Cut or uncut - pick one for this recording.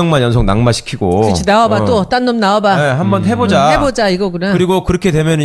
cut